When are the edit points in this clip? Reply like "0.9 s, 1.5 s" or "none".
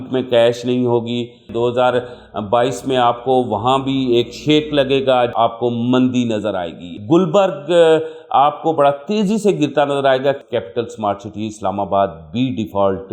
1.5 s, 5.3 s, 7.0 s, 10.4 s